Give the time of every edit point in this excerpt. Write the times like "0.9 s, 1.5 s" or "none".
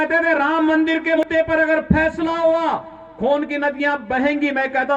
1.2 s